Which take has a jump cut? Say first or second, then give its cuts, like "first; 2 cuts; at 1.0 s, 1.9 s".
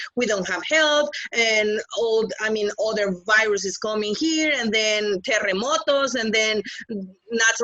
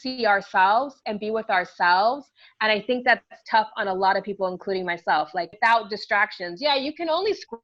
second; 1 cut; at 5.5 s